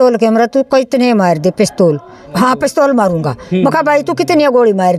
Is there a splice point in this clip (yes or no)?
yes